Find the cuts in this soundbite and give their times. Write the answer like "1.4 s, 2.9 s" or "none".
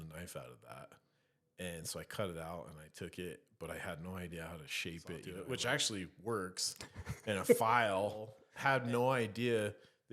5.3 s, 8.4 s